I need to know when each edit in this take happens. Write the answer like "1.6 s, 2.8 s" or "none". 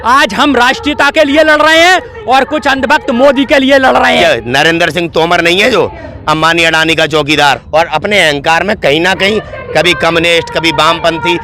4.2 s, 7.5 s